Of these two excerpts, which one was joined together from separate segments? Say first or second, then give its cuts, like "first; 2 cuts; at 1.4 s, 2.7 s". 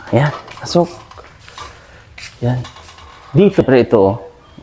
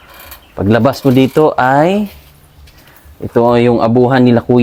first; 1 cut; at 3.6 s